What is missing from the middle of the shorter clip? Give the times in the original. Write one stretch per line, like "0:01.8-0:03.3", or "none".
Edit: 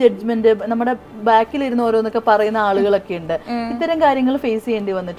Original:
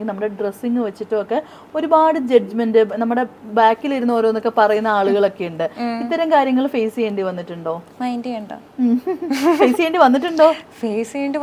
none